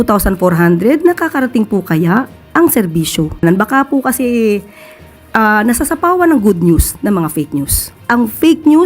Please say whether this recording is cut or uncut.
cut